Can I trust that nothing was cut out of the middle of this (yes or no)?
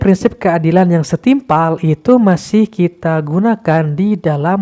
yes